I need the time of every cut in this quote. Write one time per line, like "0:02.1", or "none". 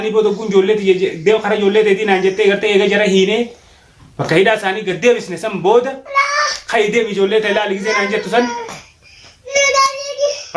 0:09.5